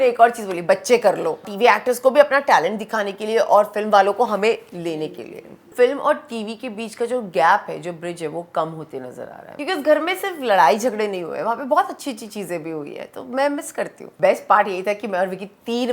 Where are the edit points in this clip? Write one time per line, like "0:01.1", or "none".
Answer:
0:01.5
0:05.7
0:09.5
0:14.1